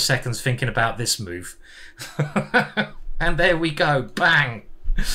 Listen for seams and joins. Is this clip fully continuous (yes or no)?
yes